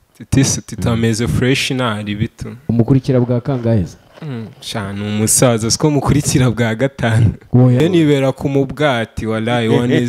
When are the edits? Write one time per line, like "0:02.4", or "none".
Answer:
0:07.8